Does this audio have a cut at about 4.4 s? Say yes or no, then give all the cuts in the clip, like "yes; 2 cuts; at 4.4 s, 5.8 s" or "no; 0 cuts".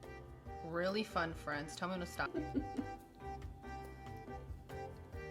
no; 1 cut; at 2.3 s